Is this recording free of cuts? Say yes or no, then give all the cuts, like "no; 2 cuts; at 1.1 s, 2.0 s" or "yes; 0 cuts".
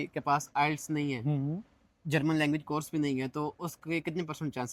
yes; 0 cuts